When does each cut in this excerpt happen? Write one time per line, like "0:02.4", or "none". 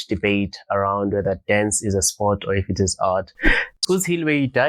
0:03.8